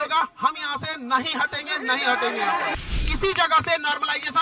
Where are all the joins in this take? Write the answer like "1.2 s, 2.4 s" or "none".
2.9 s